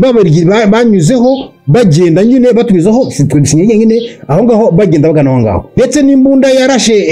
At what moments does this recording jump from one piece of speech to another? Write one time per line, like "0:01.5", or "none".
0:05.7